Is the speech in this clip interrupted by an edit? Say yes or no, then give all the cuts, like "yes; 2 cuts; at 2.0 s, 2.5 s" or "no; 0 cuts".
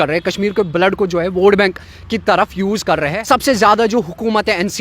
yes; 1 cut; at 3.2 s